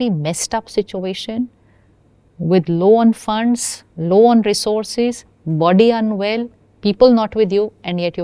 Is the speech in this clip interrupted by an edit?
no; 0 cuts

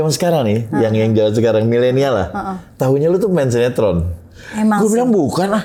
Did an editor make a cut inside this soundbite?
no; 0 cuts

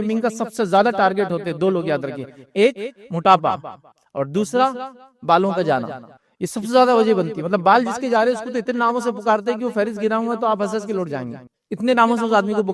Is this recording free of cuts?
yes; 0 cuts

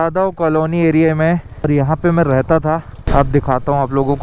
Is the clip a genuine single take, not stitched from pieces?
no; 2 cuts; at 1.7 s, 3.0 s

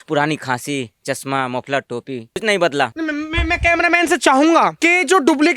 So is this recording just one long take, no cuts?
no; 3 cuts; at 2.4 s, 2.9 s, 4.8 s

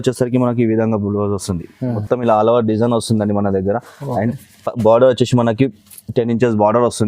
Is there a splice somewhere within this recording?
yes; 1 cut; at 2.0 s

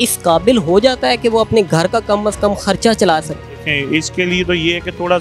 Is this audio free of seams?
yes; 0 cuts

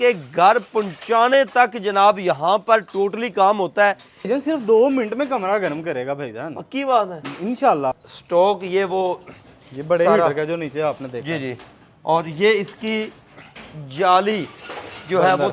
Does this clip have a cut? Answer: yes; 2 cuts; at 4.3 s, 8.0 s

